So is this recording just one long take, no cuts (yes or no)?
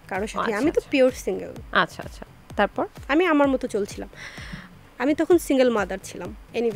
yes